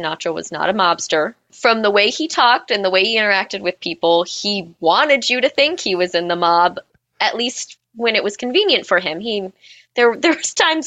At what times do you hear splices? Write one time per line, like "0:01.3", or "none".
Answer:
0:01.5